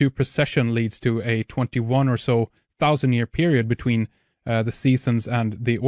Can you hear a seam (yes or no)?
no